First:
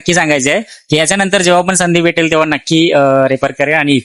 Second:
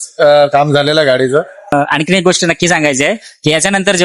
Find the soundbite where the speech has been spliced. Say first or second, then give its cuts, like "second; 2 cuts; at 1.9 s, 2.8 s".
second; 1 cut; at 1.6 s